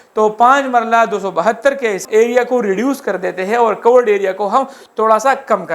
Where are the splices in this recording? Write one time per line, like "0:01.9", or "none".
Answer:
0:02.0